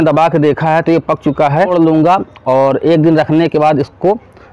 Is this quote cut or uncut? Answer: cut